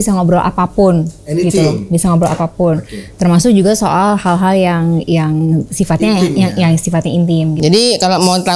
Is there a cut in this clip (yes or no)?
yes